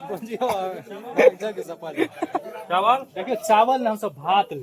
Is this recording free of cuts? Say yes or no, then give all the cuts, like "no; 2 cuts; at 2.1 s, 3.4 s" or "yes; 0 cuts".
no; 1 cut; at 2.4 s